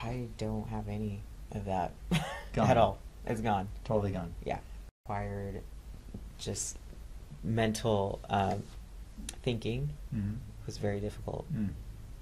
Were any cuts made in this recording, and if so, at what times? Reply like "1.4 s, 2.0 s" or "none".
4.8 s